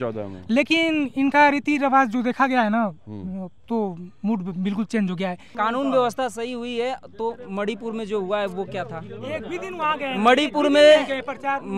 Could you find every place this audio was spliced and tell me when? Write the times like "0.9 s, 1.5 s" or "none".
5.5 s

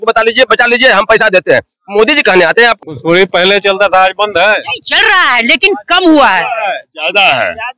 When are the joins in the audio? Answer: 2.8 s

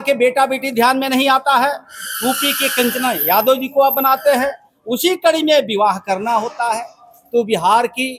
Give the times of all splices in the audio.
none

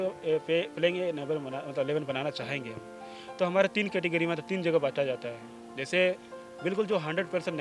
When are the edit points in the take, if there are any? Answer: none

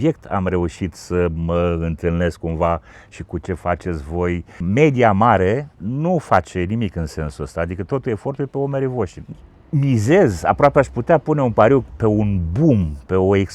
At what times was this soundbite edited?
9.2 s, 11.9 s

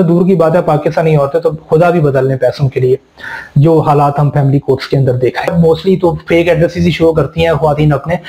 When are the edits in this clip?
5.5 s

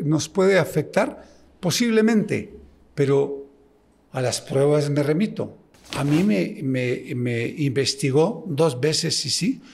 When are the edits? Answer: none

